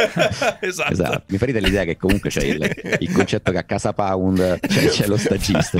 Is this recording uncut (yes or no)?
no